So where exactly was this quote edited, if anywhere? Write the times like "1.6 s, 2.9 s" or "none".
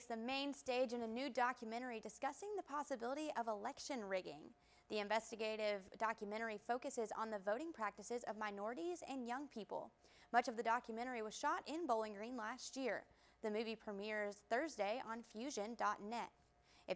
none